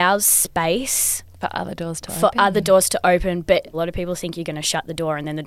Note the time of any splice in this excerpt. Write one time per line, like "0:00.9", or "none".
0:03.7